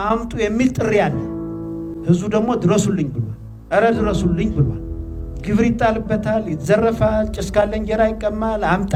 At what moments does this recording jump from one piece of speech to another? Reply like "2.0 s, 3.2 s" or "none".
none